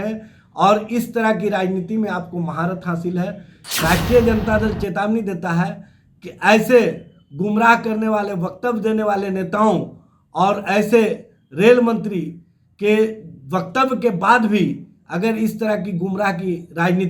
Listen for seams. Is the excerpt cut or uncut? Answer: cut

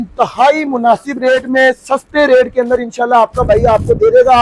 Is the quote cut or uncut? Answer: uncut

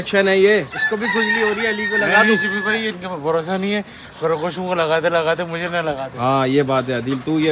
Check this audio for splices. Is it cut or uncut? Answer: uncut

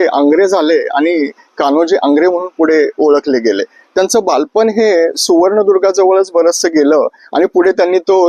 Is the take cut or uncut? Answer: uncut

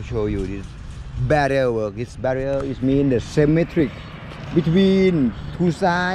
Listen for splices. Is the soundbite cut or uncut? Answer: uncut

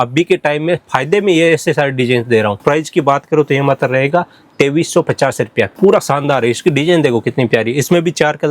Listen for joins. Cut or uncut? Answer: cut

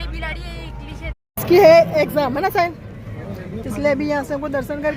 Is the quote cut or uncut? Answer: cut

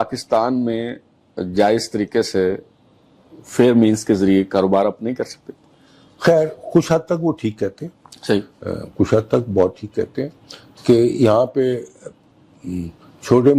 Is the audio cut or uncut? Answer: uncut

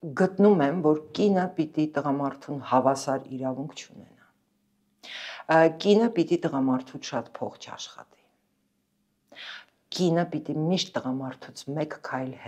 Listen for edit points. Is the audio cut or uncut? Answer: uncut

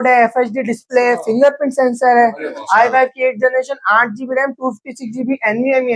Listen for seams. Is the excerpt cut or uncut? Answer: uncut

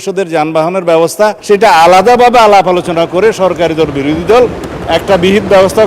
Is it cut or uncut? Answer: cut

